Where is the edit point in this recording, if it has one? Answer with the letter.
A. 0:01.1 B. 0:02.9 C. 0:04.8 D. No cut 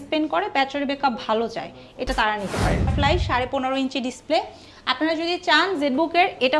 B